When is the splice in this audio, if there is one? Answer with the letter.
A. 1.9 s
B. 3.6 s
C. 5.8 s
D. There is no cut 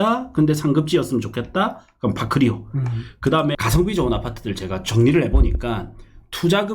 B